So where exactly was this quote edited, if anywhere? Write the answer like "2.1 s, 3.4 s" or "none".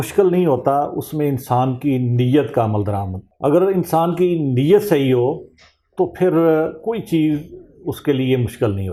none